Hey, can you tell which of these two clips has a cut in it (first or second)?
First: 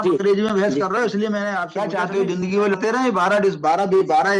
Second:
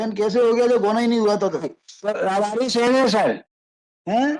first